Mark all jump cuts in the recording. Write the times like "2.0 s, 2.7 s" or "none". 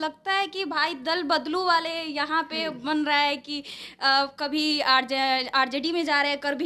none

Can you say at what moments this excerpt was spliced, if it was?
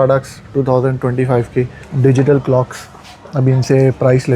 1.8 s

